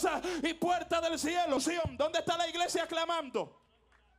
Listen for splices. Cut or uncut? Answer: cut